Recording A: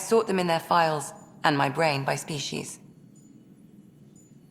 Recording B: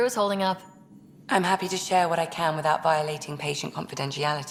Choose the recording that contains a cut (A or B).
A